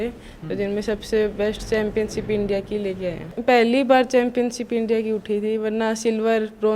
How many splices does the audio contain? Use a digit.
1